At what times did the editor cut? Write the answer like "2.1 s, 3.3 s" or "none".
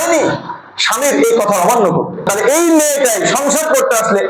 2.3 s